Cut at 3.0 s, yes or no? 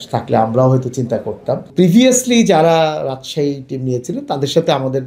no